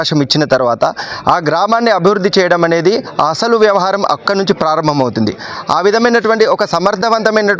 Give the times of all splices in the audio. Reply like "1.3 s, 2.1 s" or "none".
none